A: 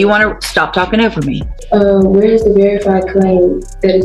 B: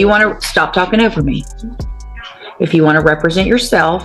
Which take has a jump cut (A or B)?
A